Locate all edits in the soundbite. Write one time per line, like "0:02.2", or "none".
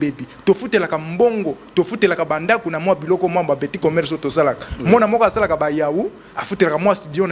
none